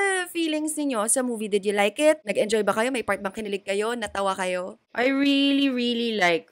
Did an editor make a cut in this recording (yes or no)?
yes